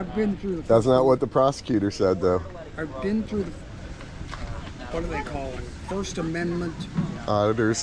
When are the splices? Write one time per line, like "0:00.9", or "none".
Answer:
0:03.8